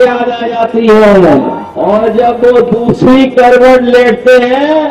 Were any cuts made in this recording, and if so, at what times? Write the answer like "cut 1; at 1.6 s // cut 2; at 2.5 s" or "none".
cut 1; at 1.6 s

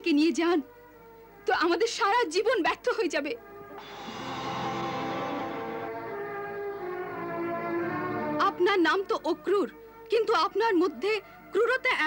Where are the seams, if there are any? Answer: none

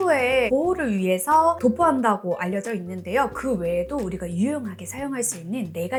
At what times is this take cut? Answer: none

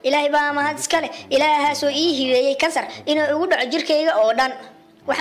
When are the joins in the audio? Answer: cut 1; at 3.8 s

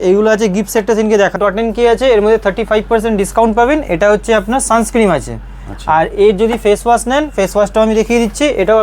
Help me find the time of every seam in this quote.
cut 1; at 1.3 s

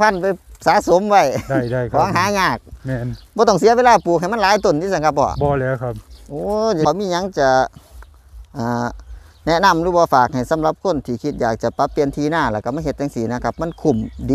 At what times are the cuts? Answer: cut 1; at 6.8 s

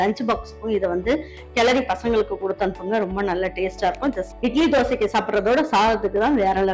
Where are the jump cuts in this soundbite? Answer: cut 1; at 4.2 s

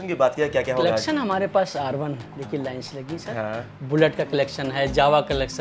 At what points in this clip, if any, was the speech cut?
none

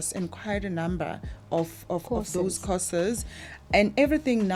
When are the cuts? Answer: none

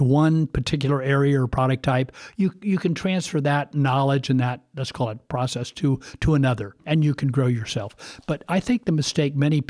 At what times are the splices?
cut 1; at 6.8 s

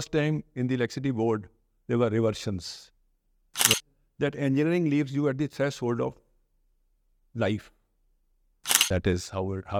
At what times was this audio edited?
cut 1; at 3.8 s // cut 2; at 8.9 s

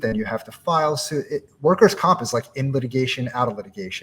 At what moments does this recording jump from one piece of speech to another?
none

